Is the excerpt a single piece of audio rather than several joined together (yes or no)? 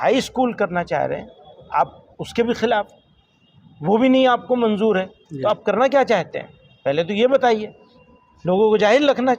yes